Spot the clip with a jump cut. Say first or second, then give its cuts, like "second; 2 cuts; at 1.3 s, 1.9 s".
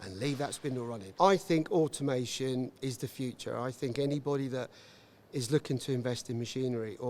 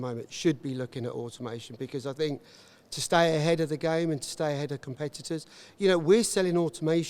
first; 1 cut; at 1.1 s